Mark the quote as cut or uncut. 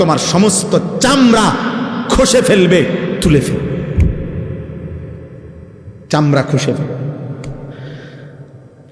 uncut